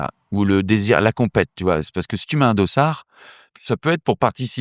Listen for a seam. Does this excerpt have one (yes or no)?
yes